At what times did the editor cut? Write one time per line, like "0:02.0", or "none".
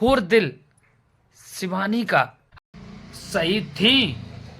0:02.4